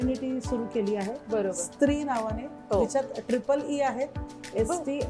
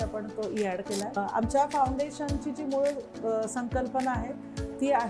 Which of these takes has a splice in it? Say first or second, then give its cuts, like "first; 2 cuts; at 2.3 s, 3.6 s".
second; 1 cut; at 1.1 s